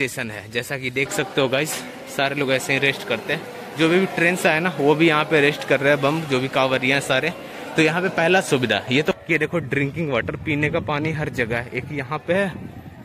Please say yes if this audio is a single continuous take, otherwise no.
no